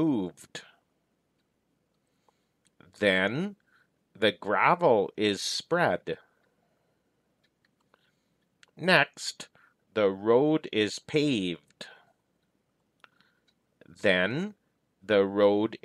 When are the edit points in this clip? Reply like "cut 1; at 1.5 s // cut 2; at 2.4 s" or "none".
cut 1; at 1.5 s // cut 2; at 7.5 s // cut 3; at 12.8 s